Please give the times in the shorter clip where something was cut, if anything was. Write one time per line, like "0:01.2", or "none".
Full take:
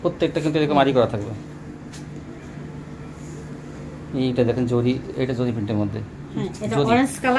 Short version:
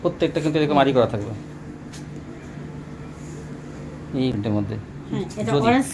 0:04.3